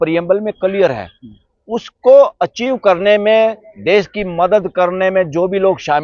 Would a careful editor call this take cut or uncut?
uncut